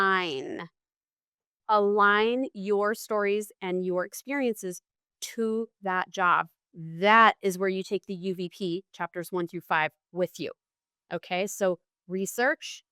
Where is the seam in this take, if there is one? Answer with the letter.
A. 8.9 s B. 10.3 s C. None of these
C